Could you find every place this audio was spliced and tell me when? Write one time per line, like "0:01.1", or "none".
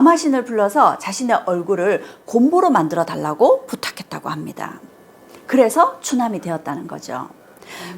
none